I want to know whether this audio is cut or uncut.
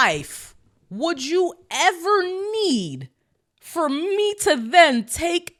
uncut